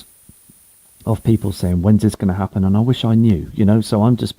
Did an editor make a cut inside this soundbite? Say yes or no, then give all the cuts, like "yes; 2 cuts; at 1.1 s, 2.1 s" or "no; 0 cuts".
yes; 1 cut; at 2.1 s